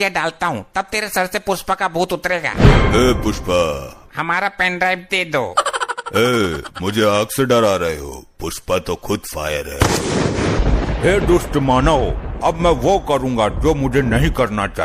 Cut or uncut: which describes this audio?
cut